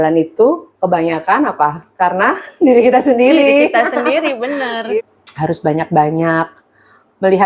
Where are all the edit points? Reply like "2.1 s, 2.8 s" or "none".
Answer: 5.0 s